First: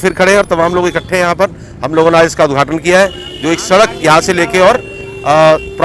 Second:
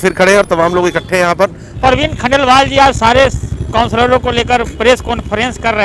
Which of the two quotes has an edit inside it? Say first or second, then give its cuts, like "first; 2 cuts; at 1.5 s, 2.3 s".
second; 1 cut; at 1.8 s